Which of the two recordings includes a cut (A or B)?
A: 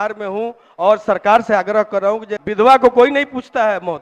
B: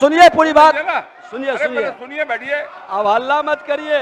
A